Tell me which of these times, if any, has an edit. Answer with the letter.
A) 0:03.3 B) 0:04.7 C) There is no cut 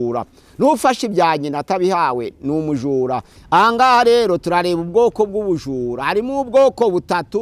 A